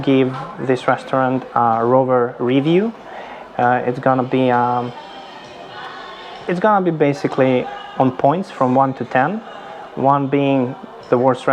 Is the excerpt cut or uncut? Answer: uncut